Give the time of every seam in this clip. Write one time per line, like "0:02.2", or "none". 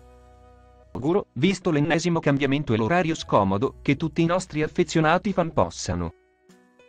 0:01.0
0:06.1